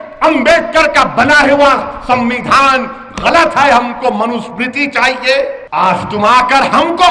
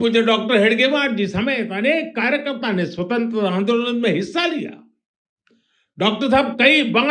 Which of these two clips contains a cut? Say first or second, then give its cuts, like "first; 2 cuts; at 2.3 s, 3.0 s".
first; 1 cut; at 5.6 s